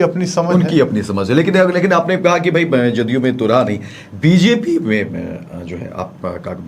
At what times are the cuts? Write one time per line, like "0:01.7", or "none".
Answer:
none